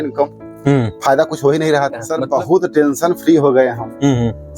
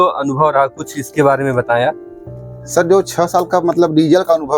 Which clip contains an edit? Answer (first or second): first